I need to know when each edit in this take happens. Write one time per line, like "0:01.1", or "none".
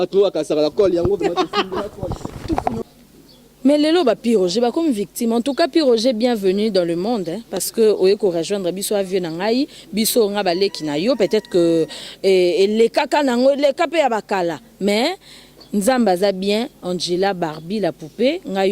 0:02.8